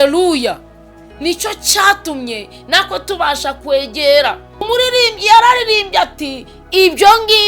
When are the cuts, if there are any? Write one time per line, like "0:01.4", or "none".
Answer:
0:04.7

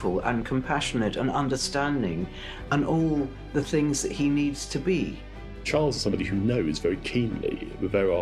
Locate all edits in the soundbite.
0:05.7

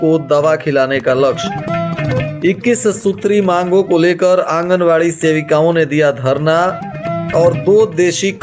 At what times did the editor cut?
none

